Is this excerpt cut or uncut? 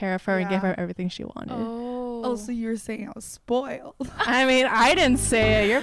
uncut